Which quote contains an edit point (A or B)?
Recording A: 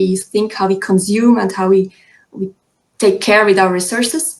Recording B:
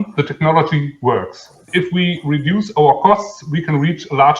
B